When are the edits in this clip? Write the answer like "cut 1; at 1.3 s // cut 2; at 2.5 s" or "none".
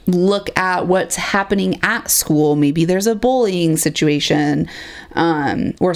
none